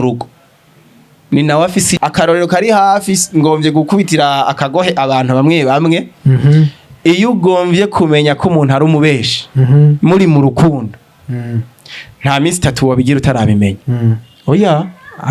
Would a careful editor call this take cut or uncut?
cut